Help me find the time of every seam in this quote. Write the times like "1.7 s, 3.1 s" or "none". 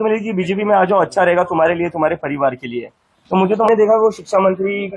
3.7 s

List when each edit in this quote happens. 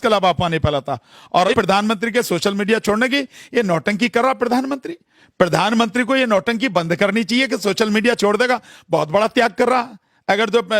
1.5 s

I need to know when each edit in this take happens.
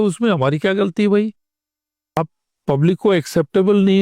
2.2 s

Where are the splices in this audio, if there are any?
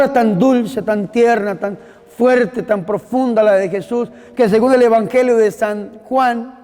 none

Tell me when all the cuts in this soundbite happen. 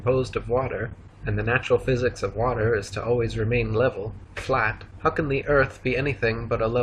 3.6 s

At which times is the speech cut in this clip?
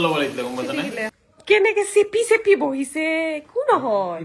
1.2 s

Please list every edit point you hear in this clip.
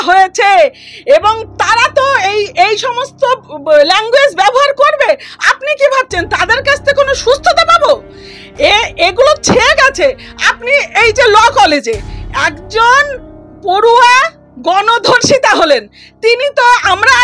none

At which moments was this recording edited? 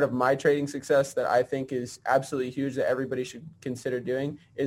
none

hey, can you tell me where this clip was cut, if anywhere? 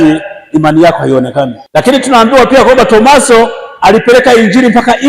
1.6 s

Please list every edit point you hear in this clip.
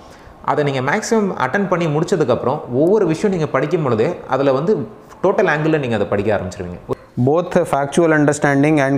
7.0 s

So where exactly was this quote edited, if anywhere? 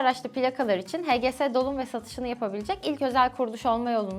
none

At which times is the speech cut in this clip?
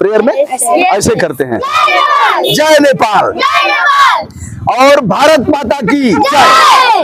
1.7 s

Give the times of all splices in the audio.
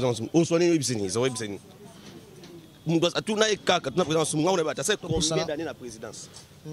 none

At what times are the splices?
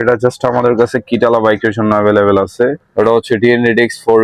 2.8 s

